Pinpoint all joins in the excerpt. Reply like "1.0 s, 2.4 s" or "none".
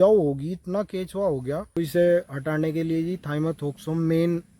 1.8 s